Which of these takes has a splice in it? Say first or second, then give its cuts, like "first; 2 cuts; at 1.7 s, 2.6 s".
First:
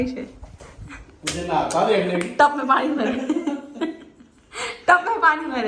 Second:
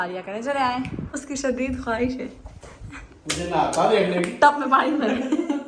second; 1 cut; at 1.1 s